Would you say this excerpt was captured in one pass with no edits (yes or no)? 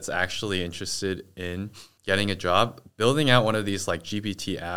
no